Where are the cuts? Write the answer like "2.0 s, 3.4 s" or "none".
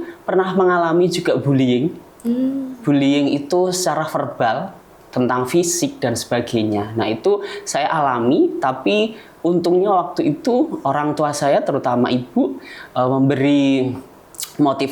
none